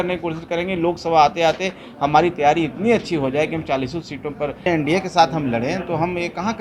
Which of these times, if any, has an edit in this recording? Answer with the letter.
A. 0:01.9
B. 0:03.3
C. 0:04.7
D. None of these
C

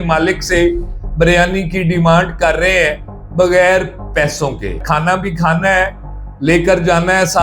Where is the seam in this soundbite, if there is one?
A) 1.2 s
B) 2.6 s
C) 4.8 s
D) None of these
C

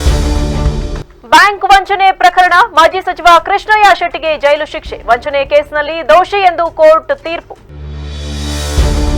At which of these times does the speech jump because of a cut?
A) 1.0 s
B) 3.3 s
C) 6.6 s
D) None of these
A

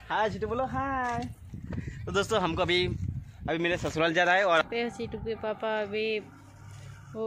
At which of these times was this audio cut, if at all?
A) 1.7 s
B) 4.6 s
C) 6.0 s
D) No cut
B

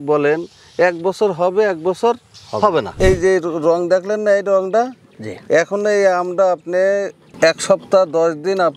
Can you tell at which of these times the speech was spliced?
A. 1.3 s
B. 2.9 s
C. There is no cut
B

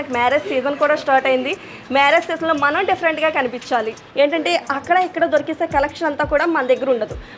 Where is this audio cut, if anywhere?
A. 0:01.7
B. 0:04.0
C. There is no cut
B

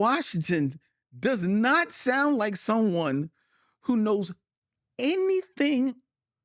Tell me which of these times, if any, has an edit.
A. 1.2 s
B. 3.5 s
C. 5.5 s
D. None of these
D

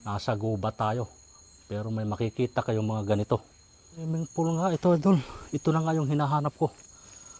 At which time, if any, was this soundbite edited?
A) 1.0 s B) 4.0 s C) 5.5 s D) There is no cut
B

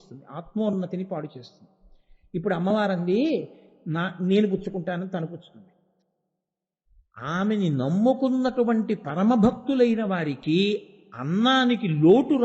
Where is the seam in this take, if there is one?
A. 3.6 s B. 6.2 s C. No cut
B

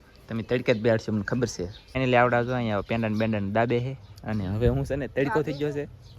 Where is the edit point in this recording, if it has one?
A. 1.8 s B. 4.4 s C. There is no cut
A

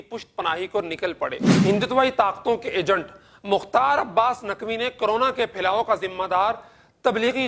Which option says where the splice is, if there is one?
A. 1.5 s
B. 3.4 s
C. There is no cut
A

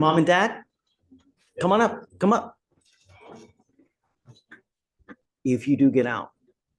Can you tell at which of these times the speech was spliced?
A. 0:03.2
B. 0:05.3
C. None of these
B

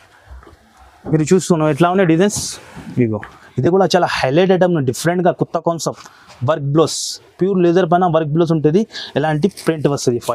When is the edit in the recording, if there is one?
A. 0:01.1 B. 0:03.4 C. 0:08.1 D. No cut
B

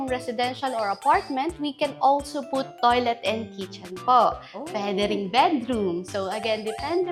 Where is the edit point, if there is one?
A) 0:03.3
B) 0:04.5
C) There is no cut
C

